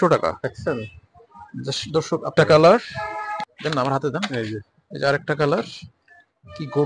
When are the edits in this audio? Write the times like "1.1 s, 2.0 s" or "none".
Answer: 2.3 s, 3.4 s